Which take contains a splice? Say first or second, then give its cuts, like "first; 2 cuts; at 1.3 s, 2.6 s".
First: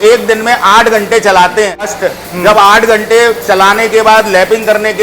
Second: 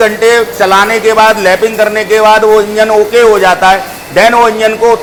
first; 1 cut; at 1.9 s